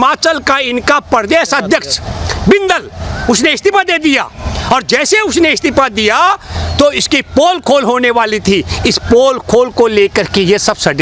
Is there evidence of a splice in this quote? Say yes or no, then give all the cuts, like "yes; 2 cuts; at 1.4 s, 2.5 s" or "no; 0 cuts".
no; 0 cuts